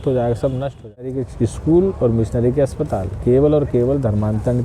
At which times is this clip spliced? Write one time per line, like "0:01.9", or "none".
0:01.3